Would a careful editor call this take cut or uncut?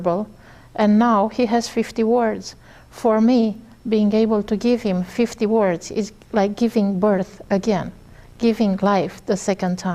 uncut